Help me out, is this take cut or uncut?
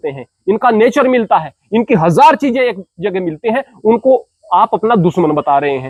uncut